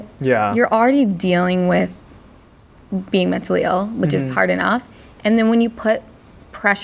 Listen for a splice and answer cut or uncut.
uncut